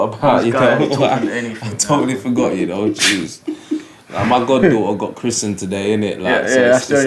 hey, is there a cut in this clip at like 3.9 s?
no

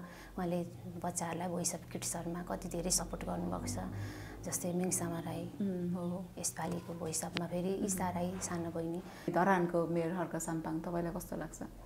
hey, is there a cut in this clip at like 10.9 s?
no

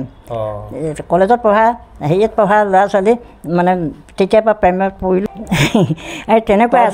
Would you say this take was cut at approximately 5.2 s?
yes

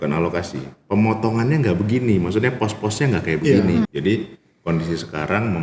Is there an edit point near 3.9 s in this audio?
yes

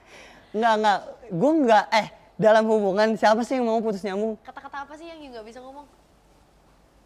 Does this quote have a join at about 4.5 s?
yes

